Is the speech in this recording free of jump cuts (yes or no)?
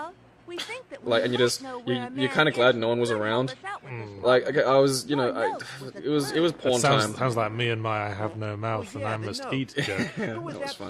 no